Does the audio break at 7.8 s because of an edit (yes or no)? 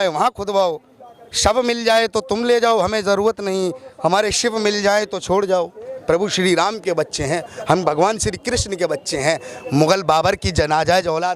no